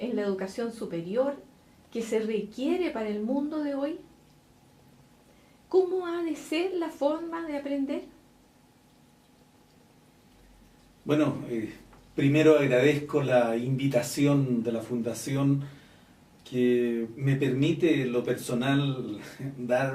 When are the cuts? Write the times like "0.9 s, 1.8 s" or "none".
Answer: 18.0 s